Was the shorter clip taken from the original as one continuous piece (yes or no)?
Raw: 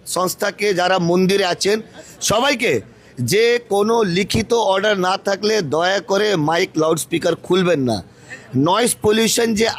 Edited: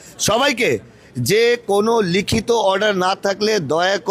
yes